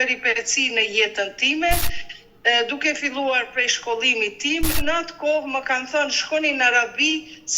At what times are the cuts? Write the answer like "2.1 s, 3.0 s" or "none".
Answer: 4.8 s